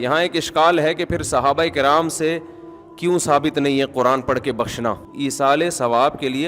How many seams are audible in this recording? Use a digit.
1